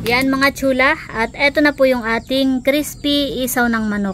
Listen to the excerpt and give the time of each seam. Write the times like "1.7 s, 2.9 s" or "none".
none